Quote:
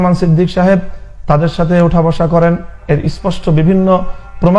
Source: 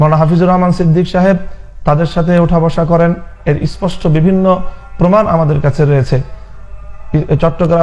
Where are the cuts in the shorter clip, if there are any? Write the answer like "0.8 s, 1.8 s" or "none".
none